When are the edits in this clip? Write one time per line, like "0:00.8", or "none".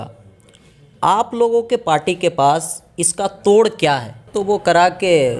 0:04.3